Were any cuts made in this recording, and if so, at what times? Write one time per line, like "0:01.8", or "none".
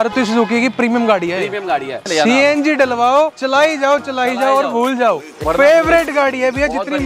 0:02.0
0:05.3